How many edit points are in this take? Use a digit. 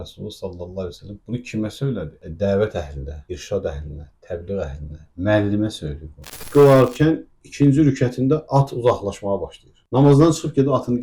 1